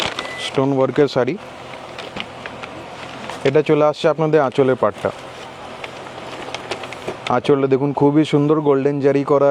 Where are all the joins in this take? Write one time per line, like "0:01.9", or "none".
none

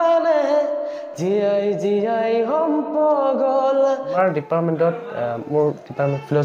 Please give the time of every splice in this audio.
0:04.2

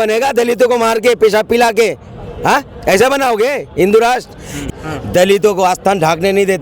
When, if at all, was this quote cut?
0:04.6

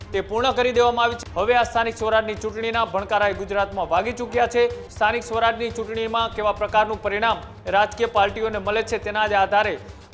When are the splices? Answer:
0:01.2
0:04.8

